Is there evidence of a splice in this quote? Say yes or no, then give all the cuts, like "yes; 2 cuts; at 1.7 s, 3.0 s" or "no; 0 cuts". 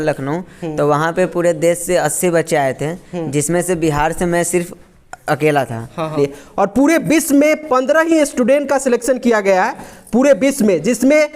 yes; 1 cut; at 6.2 s